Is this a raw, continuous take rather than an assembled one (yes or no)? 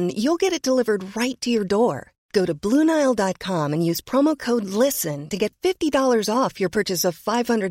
yes